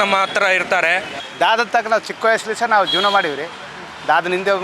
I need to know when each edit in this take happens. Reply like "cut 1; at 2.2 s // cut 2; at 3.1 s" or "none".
cut 1; at 1.2 s

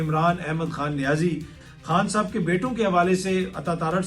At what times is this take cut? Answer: cut 1; at 1.6 s

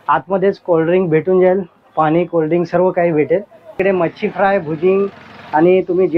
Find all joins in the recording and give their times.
cut 1; at 3.8 s

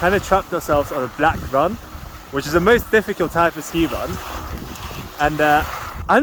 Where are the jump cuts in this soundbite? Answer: none

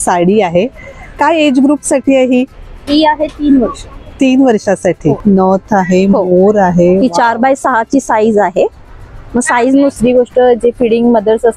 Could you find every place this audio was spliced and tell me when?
cut 1; at 5.2 s // cut 2; at 9.9 s

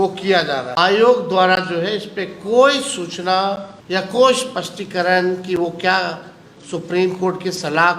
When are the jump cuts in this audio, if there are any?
cut 1; at 0.8 s // cut 2; at 3.7 s

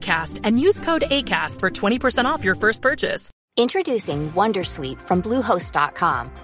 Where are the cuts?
cut 1; at 3.4 s

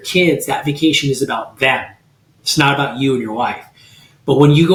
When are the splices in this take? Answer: none

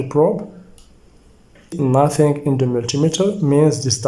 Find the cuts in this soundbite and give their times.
cut 1; at 1.7 s

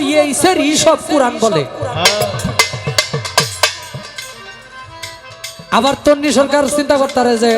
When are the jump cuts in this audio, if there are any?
none

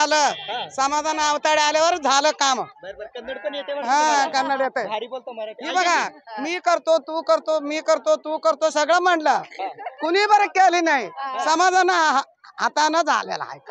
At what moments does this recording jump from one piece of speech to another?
none

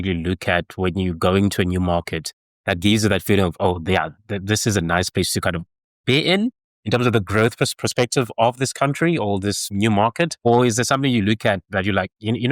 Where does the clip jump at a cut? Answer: none

